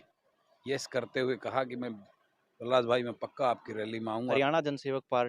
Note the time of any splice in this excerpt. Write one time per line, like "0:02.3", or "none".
0:04.3